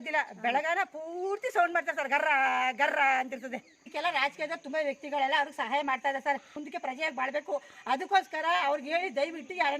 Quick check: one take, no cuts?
no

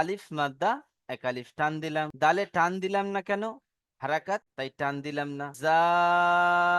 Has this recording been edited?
no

